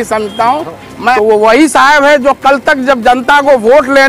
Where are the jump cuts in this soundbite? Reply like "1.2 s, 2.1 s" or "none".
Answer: 1.2 s